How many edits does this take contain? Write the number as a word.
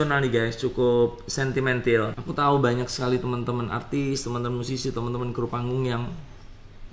one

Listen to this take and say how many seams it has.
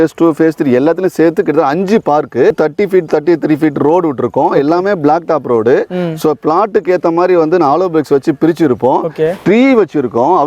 one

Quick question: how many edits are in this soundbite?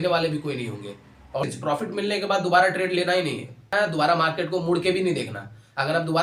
two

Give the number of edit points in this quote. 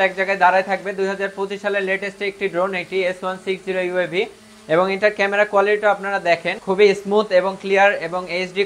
one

